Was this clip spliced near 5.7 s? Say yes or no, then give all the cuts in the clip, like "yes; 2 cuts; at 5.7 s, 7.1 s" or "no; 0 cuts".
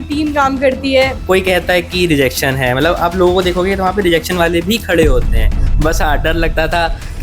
yes; 2 cuts; at 1.2 s, 5.7 s